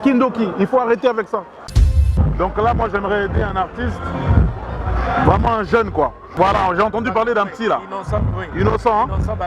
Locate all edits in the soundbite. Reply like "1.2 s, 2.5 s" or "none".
1.8 s, 6.2 s